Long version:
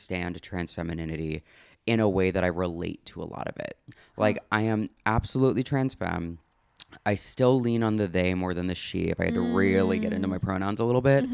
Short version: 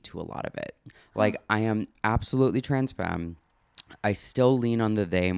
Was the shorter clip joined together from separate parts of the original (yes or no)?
no